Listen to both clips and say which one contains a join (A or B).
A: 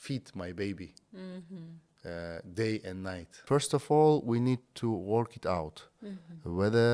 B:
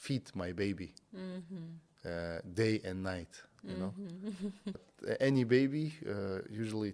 A